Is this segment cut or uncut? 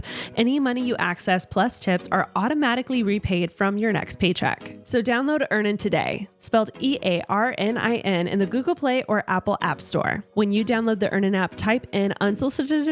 cut